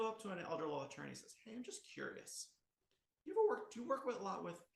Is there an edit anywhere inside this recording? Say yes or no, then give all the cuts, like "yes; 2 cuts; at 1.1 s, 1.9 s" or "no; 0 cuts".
no; 0 cuts